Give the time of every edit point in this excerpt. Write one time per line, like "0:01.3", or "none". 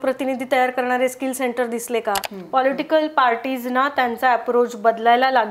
0:02.3